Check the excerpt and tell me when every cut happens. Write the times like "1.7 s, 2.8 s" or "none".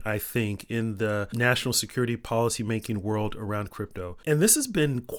none